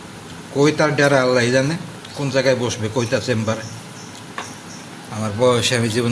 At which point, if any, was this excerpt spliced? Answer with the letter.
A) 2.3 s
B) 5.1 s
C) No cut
B